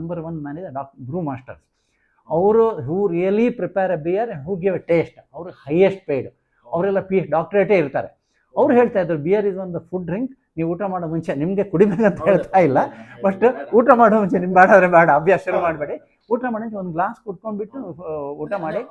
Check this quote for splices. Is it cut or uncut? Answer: uncut